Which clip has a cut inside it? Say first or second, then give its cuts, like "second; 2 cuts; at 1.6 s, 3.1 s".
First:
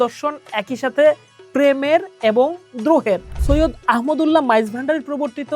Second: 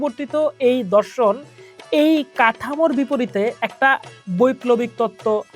first; 1 cut; at 3.3 s